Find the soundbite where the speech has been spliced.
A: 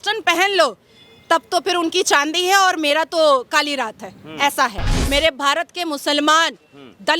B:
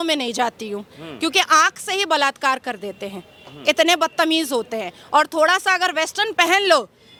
A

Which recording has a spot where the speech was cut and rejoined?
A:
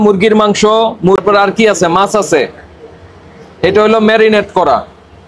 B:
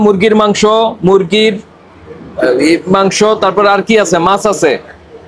A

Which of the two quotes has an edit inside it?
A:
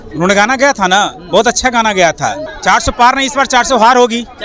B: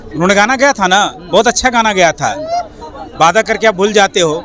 A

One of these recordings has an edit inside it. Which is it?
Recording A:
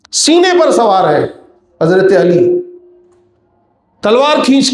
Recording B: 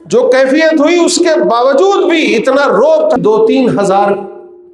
B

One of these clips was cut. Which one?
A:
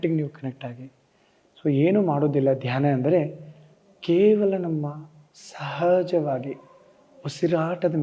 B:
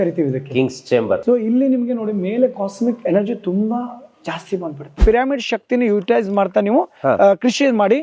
B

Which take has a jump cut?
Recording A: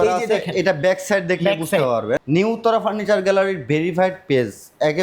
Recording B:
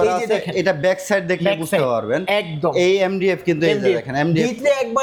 A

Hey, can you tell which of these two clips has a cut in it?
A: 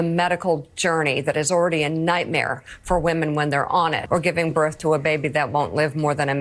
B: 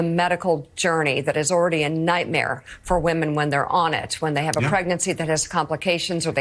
A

